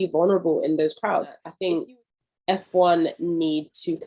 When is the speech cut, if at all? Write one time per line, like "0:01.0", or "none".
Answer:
0:01.4